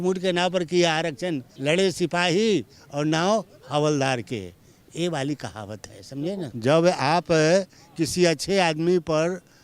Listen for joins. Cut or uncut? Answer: cut